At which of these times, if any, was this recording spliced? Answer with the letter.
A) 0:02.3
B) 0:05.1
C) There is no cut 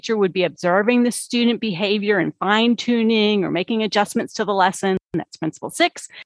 B